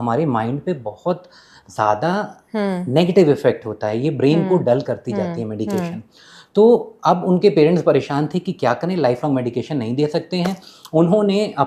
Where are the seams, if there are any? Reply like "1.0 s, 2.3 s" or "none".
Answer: none